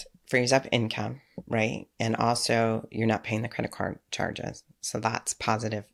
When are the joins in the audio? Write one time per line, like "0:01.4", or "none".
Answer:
none